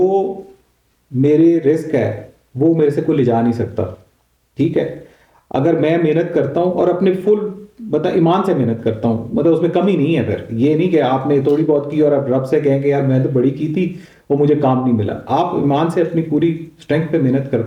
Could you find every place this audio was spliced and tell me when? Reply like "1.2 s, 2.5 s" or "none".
none